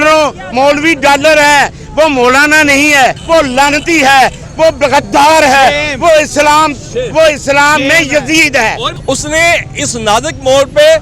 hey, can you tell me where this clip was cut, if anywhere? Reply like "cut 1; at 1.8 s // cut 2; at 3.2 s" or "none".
cut 1; at 3.2 s // cut 2; at 8.9 s